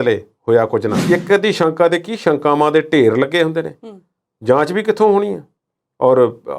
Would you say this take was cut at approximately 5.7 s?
no; 1 cut; at 0.9 s

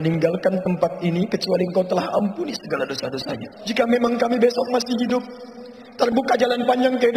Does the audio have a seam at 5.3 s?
no; 1 cut; at 3.5 s

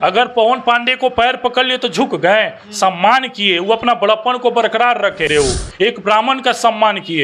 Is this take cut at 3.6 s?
no; 1 cut; at 5.2 s

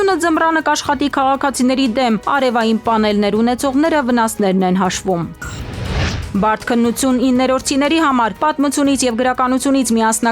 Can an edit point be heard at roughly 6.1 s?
yes; 1 cut; at 6.1 s

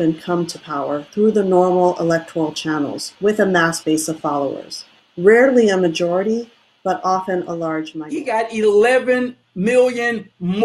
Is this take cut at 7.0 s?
no; 1 cut; at 8.2 s

